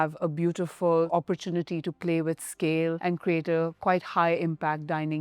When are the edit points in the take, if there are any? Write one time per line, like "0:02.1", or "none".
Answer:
0:01.1
0:03.0